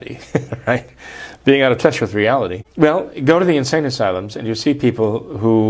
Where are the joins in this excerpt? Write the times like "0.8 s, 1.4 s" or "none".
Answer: 2.6 s

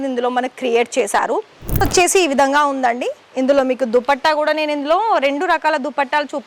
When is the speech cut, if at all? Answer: 1.8 s

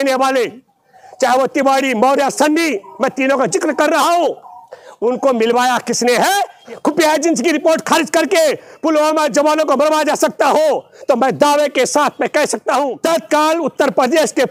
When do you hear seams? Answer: 6.6 s, 12.9 s

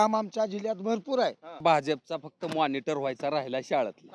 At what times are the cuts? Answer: 1.6 s

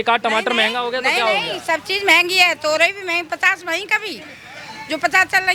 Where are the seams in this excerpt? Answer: none

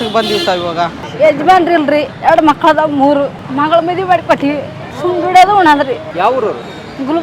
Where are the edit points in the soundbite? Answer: 1.0 s, 2.1 s, 3.4 s, 4.8 s, 6.1 s

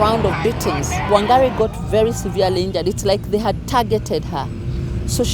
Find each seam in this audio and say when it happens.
1.1 s

